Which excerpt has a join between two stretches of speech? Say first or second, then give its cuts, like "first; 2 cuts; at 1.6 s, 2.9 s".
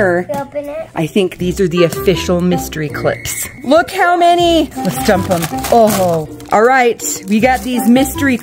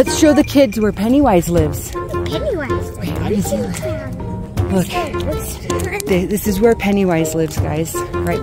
first; 3 cuts; at 3.5 s, 4.7 s, 6.3 s